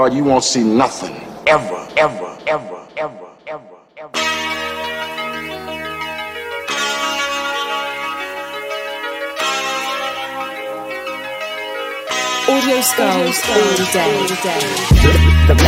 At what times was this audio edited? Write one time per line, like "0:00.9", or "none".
none